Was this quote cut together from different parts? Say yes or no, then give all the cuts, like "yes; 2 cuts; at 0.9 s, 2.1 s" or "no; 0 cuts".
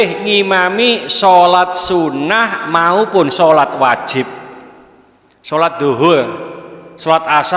no; 0 cuts